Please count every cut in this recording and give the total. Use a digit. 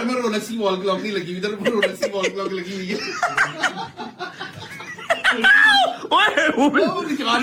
0